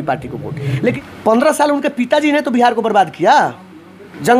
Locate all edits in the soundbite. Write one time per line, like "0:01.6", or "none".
0:00.9